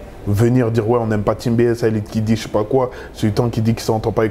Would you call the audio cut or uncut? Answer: uncut